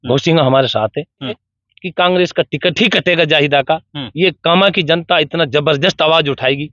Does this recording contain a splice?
yes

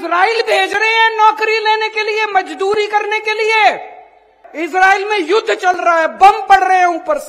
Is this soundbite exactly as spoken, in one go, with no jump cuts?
no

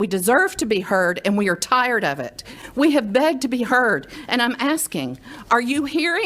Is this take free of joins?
no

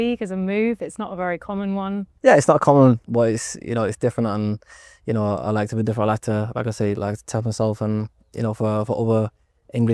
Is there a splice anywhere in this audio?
no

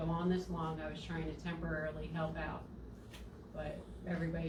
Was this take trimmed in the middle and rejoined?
no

